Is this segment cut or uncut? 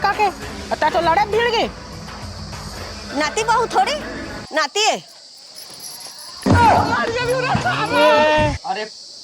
uncut